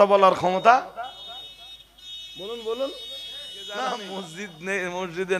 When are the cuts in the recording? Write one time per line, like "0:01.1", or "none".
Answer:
0:03.9